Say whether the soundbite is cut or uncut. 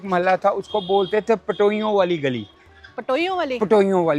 uncut